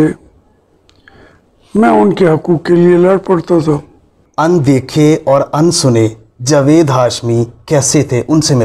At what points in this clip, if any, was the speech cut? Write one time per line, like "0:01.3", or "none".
0:04.2